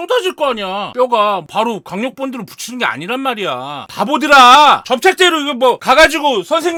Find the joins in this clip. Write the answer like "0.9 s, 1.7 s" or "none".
none